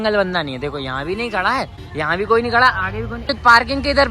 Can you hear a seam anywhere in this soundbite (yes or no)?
yes